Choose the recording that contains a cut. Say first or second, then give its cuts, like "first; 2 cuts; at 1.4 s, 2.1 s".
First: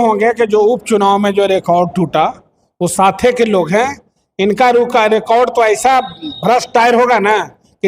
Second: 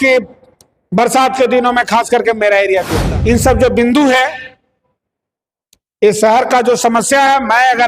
second; 1 cut; at 3.0 s